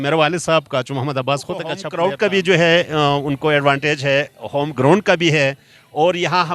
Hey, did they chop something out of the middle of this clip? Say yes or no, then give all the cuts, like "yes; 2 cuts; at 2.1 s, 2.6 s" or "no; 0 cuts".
yes; 1 cut; at 1.9 s